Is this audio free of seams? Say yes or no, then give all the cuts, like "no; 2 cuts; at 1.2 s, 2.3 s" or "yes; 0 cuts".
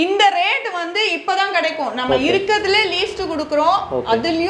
yes; 0 cuts